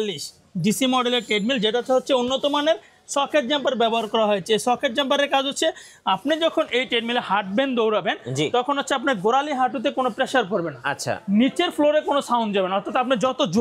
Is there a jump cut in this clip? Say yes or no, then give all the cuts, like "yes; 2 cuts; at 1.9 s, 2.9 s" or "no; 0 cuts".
no; 0 cuts